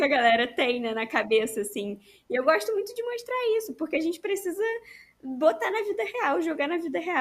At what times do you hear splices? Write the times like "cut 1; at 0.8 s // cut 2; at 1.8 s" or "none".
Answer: none